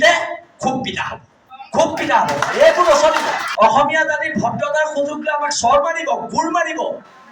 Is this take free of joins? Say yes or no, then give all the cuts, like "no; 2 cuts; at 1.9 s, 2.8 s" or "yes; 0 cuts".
no; 1 cut; at 3.4 s